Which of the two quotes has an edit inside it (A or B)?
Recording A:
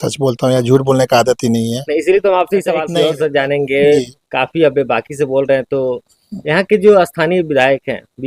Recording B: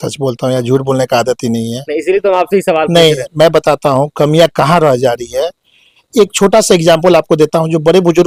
A